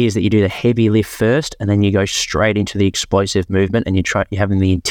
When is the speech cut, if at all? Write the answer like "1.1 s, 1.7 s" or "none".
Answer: none